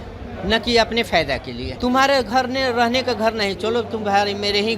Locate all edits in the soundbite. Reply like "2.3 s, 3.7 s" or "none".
1.6 s